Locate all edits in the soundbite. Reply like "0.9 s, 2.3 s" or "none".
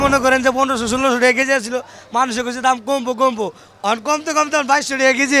none